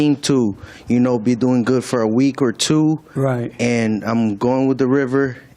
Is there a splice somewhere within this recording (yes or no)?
no